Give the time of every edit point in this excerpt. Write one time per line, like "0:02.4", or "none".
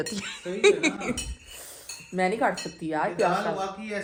none